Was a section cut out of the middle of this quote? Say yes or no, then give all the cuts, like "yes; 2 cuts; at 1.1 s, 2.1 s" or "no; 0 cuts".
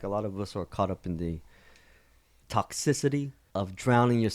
yes; 2 cuts; at 2.4 s, 3.4 s